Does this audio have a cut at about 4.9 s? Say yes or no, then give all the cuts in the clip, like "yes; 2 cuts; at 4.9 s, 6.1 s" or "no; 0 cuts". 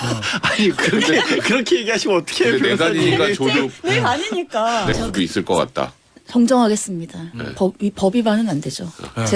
yes; 1 cut; at 4.9 s